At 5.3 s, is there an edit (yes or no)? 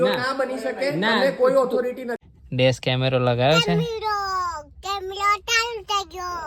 no